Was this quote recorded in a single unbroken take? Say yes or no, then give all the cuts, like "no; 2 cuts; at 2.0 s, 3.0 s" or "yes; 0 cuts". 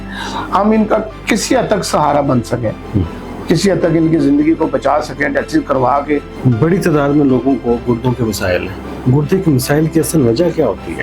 no; 1 cut; at 6.3 s